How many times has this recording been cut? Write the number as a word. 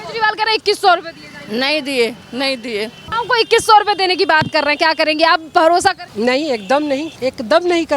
three